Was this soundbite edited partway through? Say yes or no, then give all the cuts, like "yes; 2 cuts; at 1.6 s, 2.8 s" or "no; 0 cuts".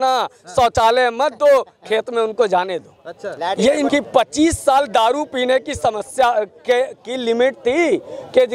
yes; 1 cut; at 3.9 s